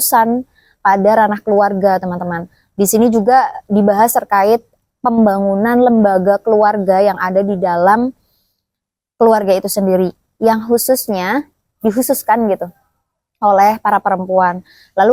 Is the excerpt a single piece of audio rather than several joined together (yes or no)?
yes